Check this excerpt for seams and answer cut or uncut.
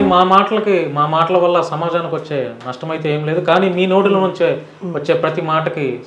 uncut